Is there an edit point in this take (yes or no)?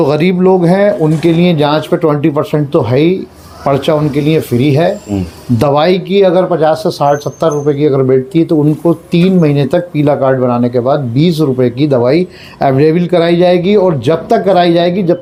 no